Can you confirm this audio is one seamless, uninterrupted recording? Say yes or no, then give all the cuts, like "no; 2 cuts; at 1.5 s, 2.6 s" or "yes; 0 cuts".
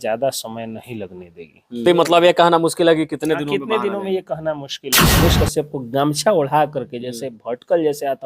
no; 2 cuts; at 1.8 s, 5.2 s